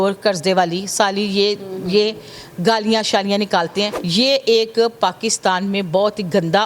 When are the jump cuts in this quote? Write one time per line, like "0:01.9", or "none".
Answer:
0:04.0